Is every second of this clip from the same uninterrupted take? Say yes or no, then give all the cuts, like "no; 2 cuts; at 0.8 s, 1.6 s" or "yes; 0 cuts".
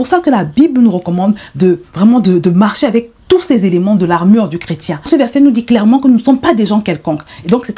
no; 1 cut; at 5.1 s